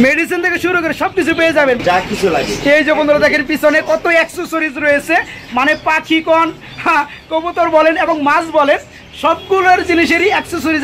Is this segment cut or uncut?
cut